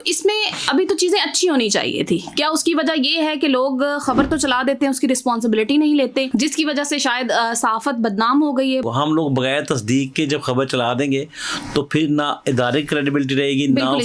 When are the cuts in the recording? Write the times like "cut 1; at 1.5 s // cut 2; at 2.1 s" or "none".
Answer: cut 1; at 6.3 s // cut 2; at 8.8 s